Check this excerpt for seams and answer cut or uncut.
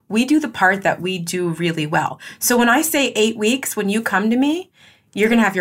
uncut